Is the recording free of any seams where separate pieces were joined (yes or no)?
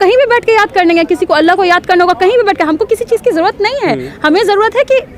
yes